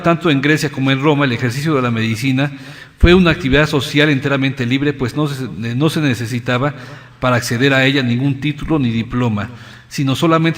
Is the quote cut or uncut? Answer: cut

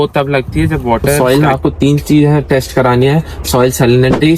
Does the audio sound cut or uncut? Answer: cut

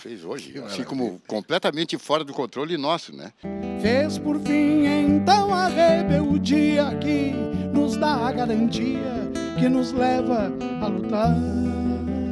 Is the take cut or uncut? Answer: cut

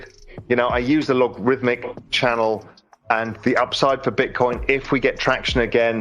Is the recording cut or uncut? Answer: cut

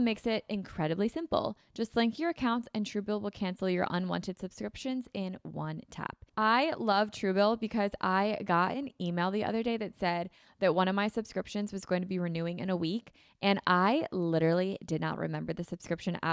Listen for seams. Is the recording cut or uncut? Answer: cut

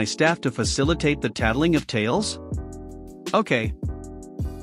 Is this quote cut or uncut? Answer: cut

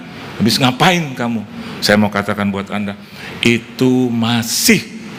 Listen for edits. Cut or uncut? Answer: uncut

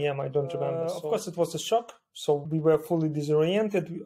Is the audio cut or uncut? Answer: cut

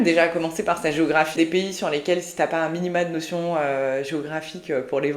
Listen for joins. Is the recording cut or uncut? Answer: cut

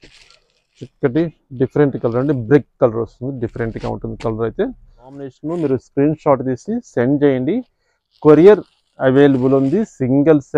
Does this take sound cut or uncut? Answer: cut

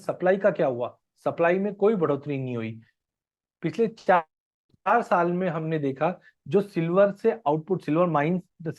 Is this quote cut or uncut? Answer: uncut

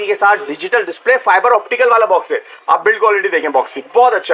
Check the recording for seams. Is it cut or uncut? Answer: uncut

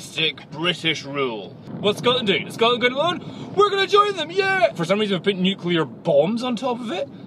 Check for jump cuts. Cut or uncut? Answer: cut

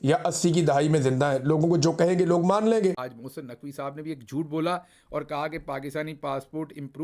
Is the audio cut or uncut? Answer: cut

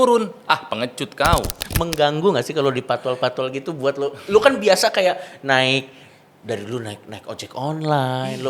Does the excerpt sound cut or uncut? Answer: cut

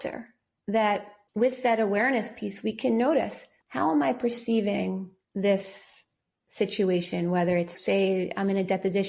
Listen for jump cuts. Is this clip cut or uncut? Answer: uncut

